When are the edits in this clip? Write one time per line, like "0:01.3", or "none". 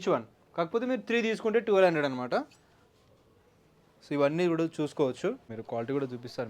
0:05.5